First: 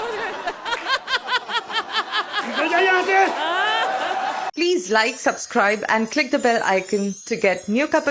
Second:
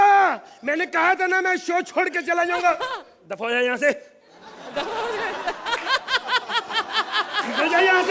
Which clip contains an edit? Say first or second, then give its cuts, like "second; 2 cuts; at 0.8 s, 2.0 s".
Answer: first; 1 cut; at 4.5 s